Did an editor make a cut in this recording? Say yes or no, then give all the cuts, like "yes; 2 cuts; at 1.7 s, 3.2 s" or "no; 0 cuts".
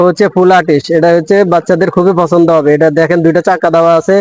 no; 0 cuts